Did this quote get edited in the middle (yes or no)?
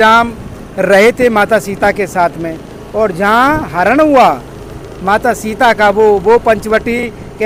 no